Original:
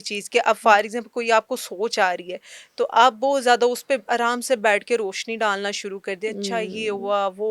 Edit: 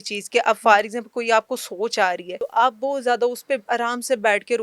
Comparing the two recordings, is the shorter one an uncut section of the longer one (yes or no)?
no